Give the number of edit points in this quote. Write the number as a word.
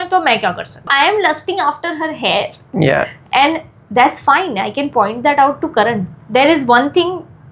two